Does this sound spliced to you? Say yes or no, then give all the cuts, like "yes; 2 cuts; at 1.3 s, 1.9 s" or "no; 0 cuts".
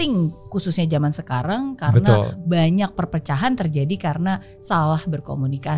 no; 0 cuts